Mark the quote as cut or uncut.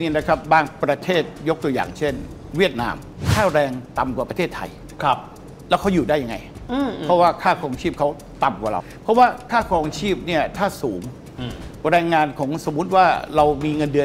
cut